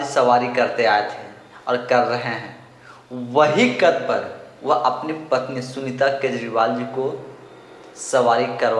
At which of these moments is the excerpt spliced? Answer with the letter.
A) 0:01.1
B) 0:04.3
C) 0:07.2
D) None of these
D